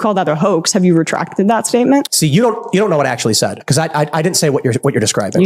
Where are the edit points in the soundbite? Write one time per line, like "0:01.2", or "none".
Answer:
none